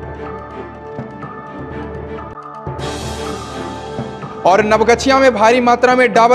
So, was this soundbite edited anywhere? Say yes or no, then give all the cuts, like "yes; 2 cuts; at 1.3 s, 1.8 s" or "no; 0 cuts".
yes; 1 cut; at 2.3 s